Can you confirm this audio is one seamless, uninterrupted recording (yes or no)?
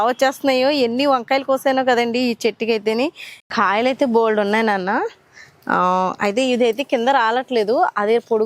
no